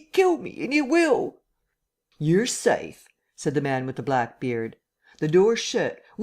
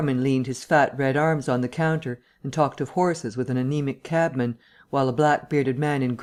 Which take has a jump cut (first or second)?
first